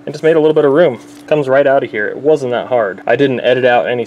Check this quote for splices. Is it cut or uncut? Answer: cut